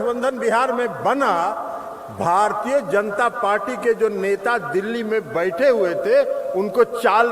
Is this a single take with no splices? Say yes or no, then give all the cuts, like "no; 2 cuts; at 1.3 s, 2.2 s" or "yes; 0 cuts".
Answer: yes; 0 cuts